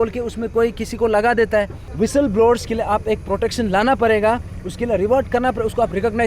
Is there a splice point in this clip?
yes; 1 cut; at 1.8 s

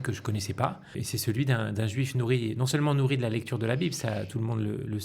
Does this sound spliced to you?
yes; 1 cut; at 1.0 s

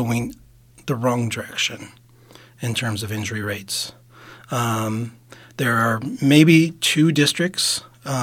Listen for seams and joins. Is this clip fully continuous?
yes; 0 cuts

